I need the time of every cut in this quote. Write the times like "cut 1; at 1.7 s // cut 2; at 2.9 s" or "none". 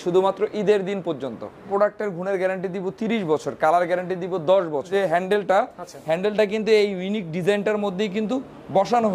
cut 1; at 1.7 s // cut 2; at 4.9 s